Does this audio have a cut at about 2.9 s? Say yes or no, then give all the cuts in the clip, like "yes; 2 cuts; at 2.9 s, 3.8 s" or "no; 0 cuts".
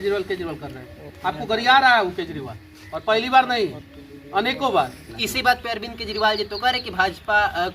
no; 1 cut; at 5.1 s